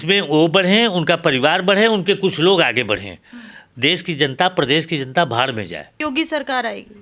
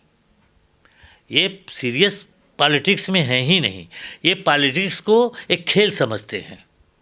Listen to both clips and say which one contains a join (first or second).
first